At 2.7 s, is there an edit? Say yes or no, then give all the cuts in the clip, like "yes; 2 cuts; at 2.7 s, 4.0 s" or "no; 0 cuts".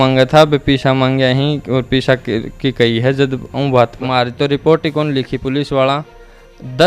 no; 1 cut; at 4.0 s